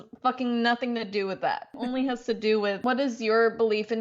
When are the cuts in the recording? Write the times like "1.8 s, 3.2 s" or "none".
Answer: 1.8 s, 2.8 s